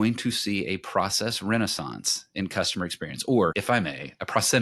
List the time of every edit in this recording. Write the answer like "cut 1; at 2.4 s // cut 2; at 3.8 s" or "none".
cut 1; at 3.5 s